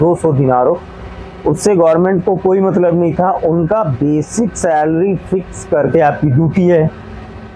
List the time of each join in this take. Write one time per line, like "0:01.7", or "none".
0:05.8

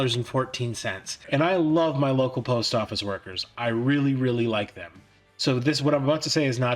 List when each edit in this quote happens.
0:01.2

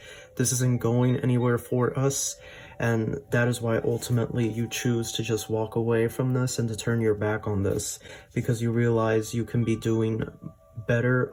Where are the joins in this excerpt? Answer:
none

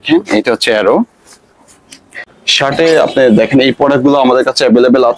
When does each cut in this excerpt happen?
0:02.2

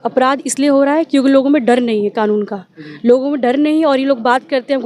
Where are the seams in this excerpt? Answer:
none

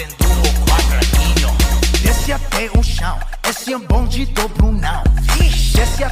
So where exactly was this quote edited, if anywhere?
none

